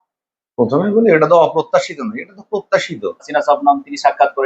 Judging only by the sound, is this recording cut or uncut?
cut